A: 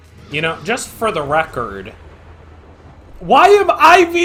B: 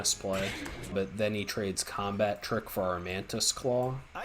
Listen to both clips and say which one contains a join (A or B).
B